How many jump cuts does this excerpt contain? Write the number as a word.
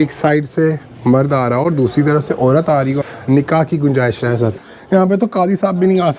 two